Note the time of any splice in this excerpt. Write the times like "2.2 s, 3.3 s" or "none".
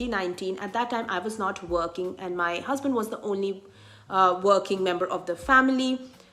none